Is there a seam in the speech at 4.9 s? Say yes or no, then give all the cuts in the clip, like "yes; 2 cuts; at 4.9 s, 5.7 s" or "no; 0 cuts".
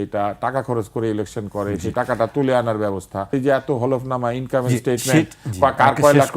no; 1 cut; at 3.3 s